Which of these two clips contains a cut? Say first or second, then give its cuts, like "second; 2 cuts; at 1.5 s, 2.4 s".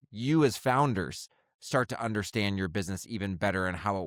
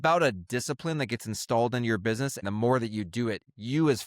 second; 1 cut; at 2.4 s